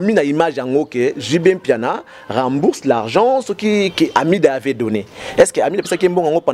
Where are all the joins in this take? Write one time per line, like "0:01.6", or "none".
0:04.1